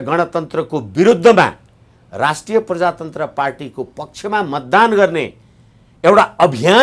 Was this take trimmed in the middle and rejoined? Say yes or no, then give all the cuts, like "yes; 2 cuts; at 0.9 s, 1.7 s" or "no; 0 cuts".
no; 0 cuts